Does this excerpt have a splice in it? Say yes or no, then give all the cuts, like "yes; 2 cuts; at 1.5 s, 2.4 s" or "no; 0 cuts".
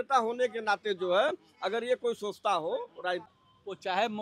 yes; 1 cut; at 3.2 s